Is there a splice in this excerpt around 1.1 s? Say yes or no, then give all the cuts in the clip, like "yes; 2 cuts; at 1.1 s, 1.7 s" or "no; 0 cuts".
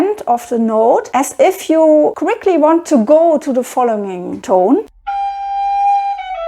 no; 0 cuts